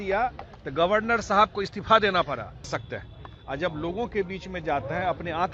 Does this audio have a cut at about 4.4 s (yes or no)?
no